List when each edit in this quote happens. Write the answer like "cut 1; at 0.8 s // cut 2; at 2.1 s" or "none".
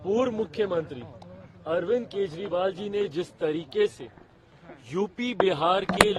none